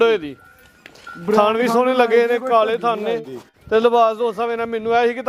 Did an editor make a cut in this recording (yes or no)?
no